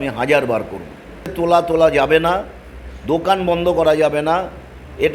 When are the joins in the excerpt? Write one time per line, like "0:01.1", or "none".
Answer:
0:01.3